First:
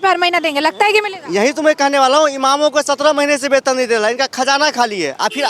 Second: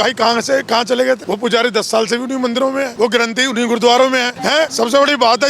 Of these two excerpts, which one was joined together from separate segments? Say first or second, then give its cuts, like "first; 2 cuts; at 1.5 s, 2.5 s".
second; 3 cuts; at 1.2 s, 2.9 s, 4.6 s